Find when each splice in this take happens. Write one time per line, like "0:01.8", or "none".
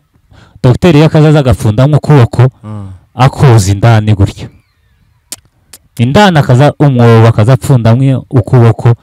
none